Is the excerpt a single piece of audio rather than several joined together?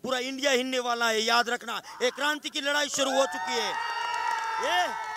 yes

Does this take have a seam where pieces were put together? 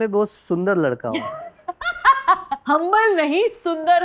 yes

